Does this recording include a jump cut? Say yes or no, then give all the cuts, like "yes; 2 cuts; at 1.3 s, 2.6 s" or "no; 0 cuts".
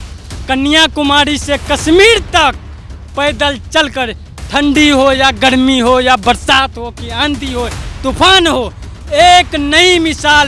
no; 0 cuts